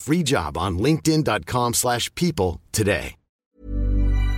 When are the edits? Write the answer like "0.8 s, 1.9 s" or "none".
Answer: 3.4 s

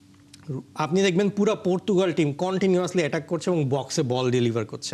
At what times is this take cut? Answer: none

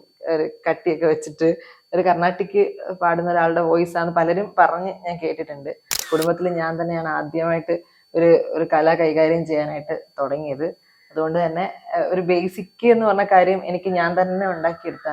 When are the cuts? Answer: 6.0 s

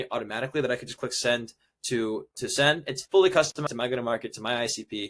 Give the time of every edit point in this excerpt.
3.7 s

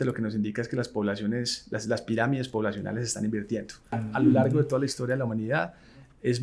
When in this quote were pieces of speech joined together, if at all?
4.0 s

